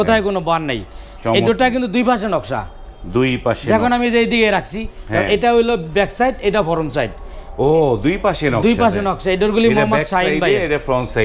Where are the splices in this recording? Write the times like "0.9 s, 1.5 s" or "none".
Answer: none